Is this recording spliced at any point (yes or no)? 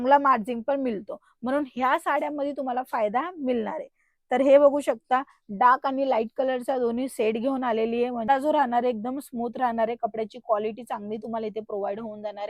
yes